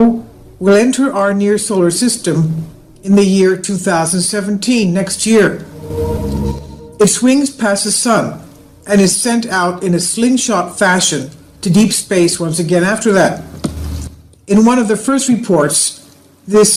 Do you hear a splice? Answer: no; 0 cuts

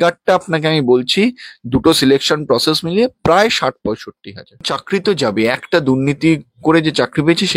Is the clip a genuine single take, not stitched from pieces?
no; 1 cut; at 4.6 s

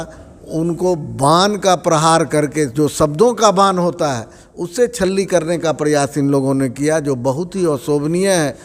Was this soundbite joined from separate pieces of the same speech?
no; 0 cuts

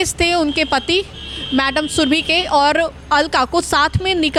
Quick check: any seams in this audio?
no; 0 cuts

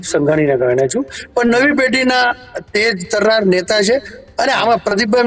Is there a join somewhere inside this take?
no; 0 cuts

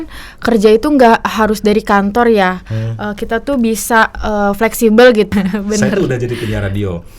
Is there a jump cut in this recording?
yes; 1 cut; at 5.3 s

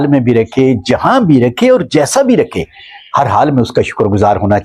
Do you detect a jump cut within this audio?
no; 0 cuts

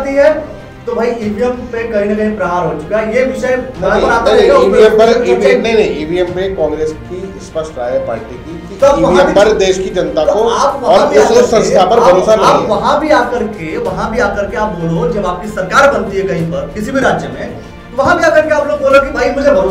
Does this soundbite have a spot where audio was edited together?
no; 0 cuts

